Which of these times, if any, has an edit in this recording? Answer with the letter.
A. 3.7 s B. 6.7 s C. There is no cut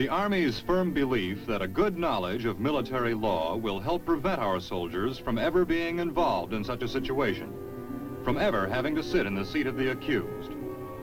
B